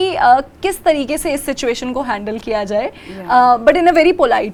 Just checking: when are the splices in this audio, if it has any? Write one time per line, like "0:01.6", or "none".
none